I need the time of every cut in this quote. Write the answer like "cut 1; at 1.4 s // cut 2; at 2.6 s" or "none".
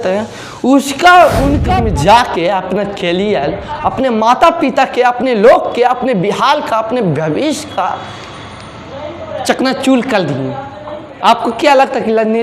cut 1; at 1.6 s